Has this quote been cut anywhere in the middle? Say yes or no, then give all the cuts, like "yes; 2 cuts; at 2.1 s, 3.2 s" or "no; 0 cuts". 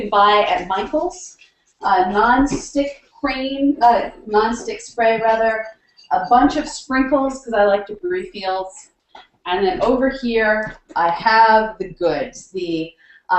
no; 0 cuts